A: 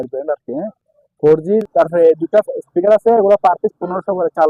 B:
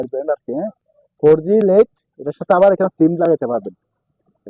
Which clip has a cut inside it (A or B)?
A